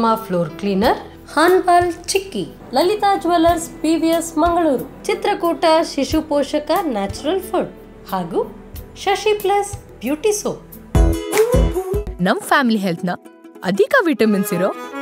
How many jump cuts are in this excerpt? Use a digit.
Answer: 1